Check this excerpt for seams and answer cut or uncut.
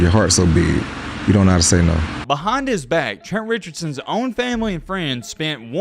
cut